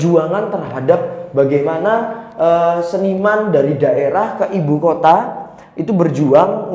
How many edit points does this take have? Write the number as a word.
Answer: zero